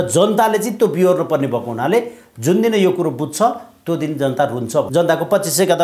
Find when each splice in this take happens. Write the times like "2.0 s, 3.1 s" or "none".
4.9 s